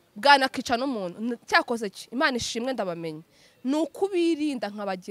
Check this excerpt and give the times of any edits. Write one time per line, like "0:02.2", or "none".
none